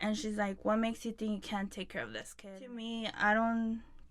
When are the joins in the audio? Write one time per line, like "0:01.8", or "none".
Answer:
0:02.3

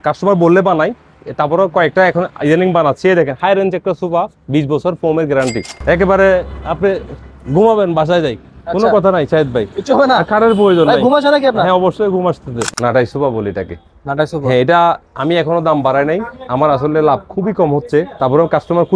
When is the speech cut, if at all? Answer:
0:05.7
0:12.7

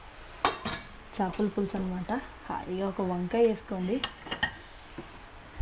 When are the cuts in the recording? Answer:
none

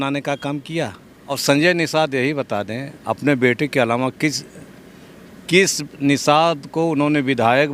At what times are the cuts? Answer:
0:01.4

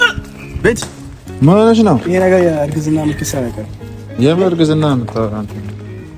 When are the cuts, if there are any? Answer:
none

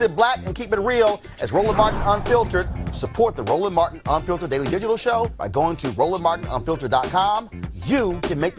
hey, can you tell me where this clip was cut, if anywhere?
0:07.7

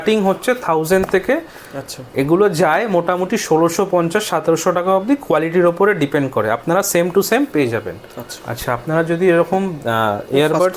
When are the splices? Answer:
none

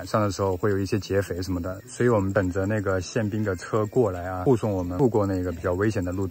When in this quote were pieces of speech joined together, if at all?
0:02.3
0:04.8

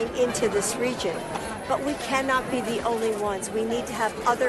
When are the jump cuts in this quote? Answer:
none

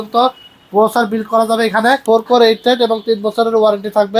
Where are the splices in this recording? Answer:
0:02.0

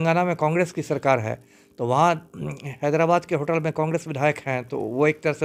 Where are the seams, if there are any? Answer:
none

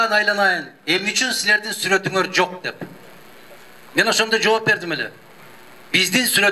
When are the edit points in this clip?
none

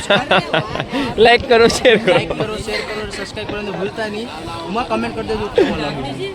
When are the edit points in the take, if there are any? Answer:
none

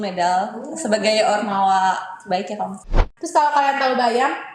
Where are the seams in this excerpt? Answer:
0:02.9

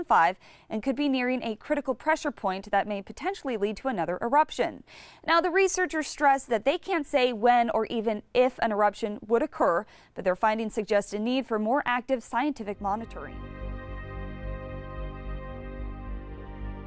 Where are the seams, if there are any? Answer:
0:06.8

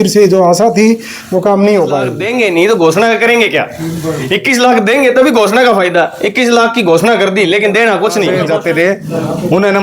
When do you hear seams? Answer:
0:02.2
0:08.4

